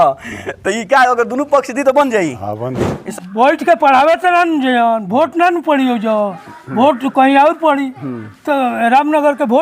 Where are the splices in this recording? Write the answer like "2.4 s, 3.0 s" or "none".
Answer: 3.0 s